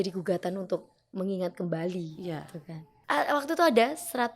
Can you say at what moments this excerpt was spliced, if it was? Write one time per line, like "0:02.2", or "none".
0:02.9